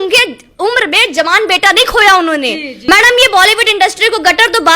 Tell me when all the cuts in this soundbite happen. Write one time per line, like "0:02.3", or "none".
0:02.9